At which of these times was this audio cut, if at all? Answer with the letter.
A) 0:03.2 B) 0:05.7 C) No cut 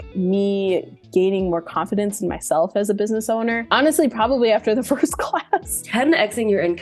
B